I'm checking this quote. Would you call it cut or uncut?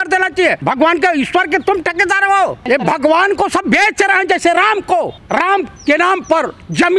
cut